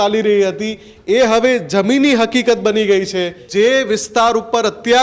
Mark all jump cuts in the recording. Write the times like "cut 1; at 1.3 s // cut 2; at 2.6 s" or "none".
cut 1; at 3.4 s